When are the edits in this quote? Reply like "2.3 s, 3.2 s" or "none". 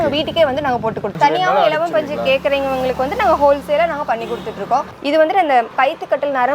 1.1 s, 4.9 s